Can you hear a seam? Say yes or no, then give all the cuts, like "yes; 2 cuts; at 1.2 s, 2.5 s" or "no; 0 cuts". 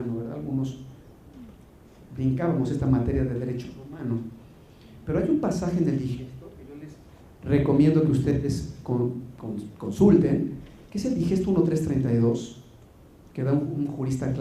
yes; 1 cut; at 7.8 s